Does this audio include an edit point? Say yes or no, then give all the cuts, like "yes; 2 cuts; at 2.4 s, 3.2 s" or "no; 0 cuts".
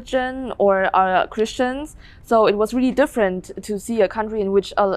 no; 0 cuts